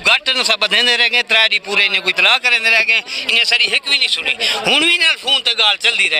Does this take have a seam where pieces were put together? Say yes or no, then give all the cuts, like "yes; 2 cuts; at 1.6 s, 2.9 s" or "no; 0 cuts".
no; 0 cuts